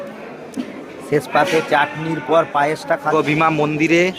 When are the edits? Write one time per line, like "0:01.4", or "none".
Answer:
0:03.1